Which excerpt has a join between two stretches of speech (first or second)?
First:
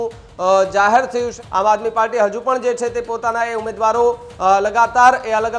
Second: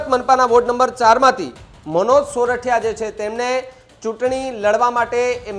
first